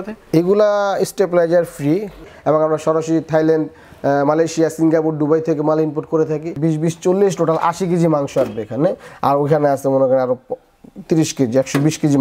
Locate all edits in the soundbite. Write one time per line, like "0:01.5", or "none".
0:02.2
0:06.6